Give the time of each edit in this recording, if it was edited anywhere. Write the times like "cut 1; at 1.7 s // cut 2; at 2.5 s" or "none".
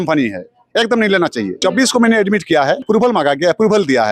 cut 1; at 1.5 s // cut 2; at 2.9 s